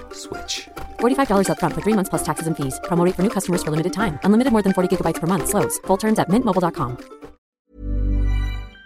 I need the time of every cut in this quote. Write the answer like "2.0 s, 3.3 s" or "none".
7.5 s